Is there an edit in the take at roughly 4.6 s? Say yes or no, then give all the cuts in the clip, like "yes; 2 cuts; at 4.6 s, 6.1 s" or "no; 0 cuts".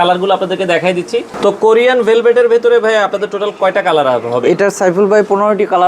no; 1 cut; at 1.3 s